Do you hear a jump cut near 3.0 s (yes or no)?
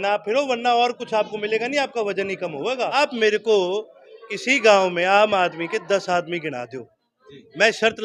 yes